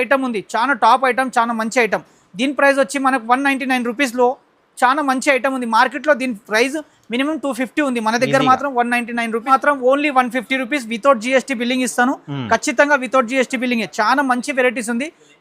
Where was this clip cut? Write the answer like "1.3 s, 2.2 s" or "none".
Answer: 9.4 s

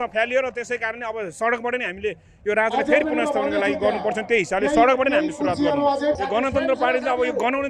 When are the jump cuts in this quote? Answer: none

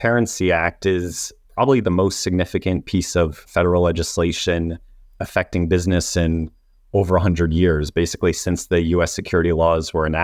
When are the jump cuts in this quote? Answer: 3.4 s

